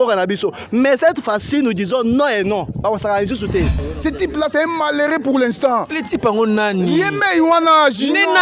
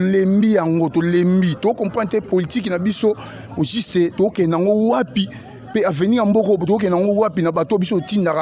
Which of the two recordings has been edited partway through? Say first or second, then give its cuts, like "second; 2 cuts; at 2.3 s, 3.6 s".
first; 1 cut; at 3.8 s